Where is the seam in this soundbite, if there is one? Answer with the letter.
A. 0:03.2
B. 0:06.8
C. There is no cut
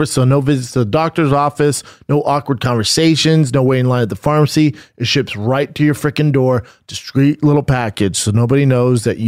C